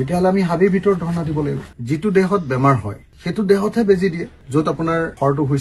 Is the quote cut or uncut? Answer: cut